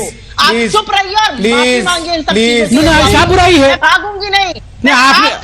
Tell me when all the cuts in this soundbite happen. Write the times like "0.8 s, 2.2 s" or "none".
3.1 s